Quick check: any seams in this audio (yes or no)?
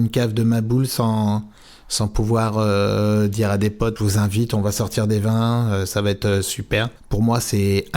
yes